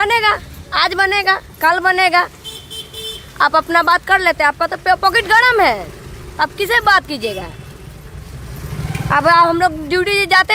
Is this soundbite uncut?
yes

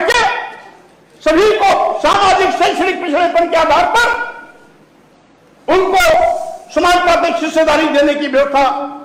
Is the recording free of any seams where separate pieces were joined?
yes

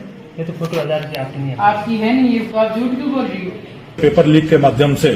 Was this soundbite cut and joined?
yes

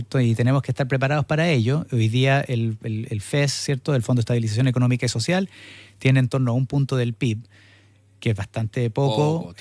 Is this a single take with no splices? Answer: yes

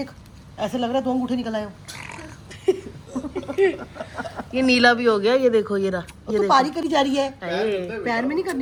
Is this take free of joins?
yes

